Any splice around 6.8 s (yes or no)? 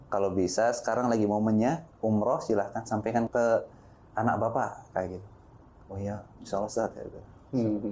no